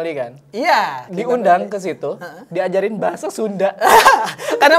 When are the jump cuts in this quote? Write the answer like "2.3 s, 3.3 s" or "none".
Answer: none